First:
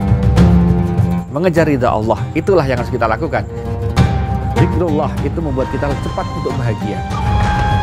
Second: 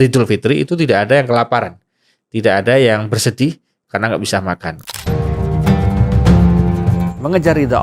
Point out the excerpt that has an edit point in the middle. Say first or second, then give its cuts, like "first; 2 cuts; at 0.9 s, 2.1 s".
second; 1 cut; at 4.7 s